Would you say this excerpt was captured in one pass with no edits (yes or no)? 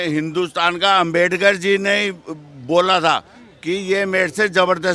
yes